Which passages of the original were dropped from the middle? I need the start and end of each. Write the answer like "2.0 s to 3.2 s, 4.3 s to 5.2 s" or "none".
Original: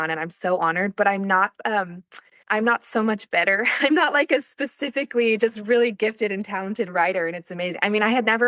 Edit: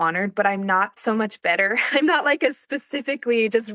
1.6 s to 2.8 s